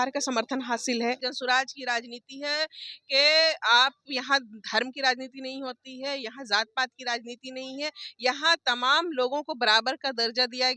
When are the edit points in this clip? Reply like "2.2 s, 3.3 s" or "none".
1.3 s

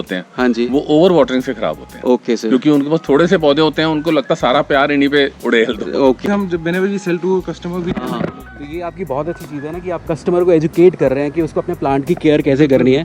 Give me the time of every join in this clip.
6.2 s

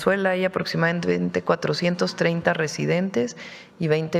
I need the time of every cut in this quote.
none

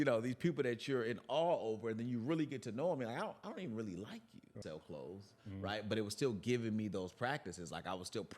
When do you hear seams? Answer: 4.6 s

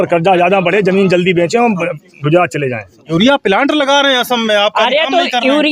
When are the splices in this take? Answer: 3.0 s

